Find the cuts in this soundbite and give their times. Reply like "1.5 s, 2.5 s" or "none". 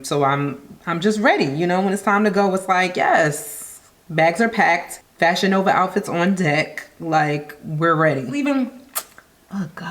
8.4 s